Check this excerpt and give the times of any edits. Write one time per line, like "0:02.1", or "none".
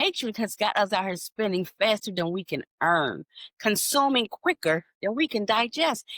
none